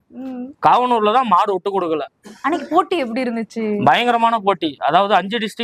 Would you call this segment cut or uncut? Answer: uncut